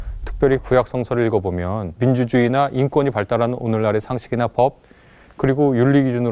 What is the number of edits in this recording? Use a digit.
1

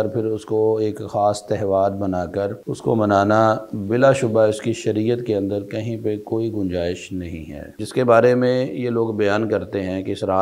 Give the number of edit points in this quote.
2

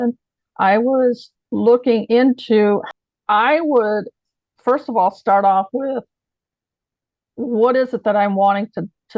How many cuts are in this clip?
1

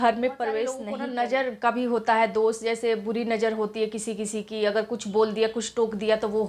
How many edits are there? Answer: 1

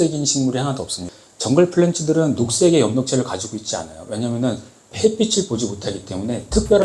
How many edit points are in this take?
1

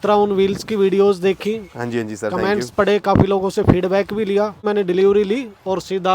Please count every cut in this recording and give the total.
1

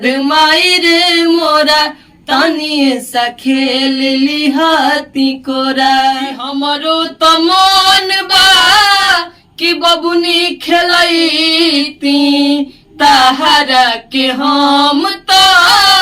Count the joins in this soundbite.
1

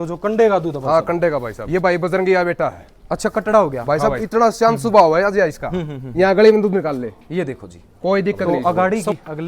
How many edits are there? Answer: 3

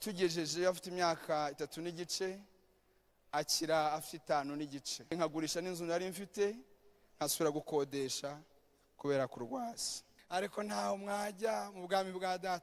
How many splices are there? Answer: 2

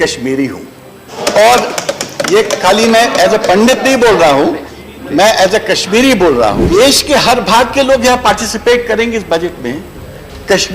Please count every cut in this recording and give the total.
2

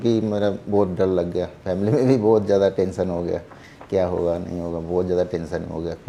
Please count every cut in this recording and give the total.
0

